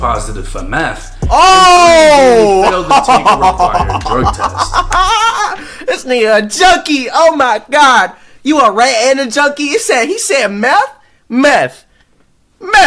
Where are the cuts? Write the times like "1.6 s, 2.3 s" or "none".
1.1 s